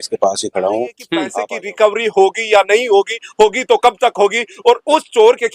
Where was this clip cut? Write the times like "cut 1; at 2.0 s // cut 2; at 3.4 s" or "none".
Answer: cut 1; at 1.3 s